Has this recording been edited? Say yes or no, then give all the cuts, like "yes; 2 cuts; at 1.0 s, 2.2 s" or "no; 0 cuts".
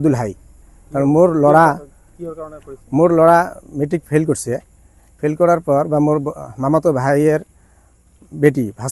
no; 0 cuts